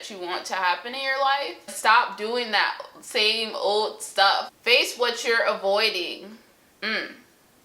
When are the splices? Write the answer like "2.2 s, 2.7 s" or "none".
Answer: 1.7 s, 4.5 s